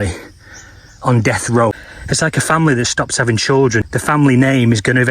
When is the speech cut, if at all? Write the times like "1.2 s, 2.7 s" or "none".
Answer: 1.9 s, 3.9 s